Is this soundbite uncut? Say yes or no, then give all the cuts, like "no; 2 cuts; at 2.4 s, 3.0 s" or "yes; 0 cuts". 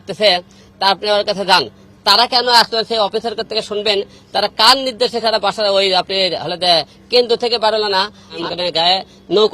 no; 1 cut; at 8.4 s